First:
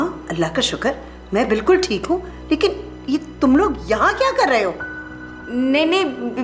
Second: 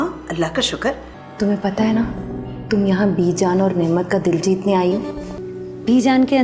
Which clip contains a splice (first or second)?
second